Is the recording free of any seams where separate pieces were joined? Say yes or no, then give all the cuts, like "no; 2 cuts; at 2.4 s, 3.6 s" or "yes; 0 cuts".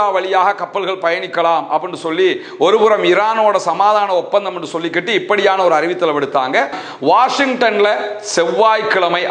no; 1 cut; at 6.8 s